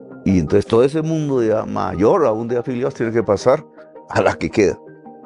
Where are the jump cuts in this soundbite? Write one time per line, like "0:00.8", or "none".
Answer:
none